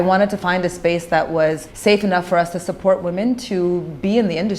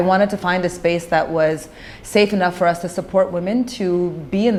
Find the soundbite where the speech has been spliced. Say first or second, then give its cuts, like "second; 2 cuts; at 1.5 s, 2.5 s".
first; 1 cut; at 1.7 s